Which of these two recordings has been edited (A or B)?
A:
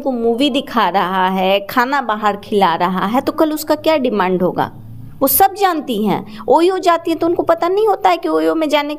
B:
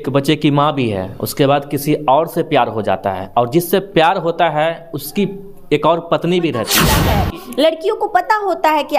B